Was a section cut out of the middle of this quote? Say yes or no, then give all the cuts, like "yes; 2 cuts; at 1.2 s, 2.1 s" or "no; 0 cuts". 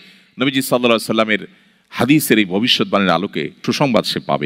yes; 1 cut; at 3.6 s